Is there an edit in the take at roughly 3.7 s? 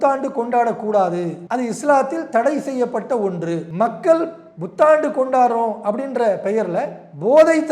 yes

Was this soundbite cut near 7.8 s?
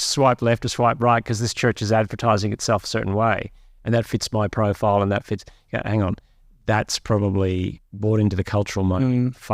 yes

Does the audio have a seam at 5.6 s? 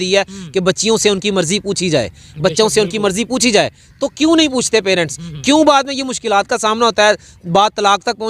no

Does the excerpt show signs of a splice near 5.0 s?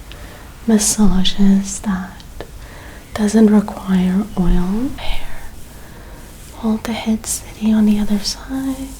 yes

